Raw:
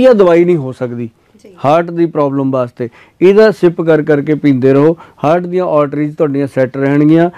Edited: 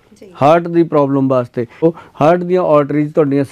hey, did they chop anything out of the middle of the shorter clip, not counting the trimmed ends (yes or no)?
yes